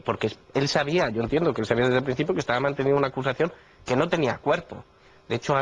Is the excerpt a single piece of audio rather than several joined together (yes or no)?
no